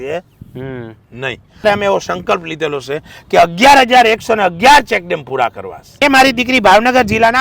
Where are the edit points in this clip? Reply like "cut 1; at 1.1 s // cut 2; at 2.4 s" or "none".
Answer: cut 1; at 1.6 s // cut 2; at 6.0 s